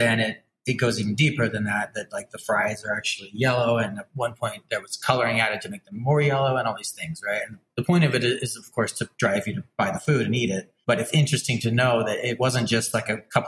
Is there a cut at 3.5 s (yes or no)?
no